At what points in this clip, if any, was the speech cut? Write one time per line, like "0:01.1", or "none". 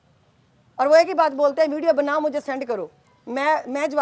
none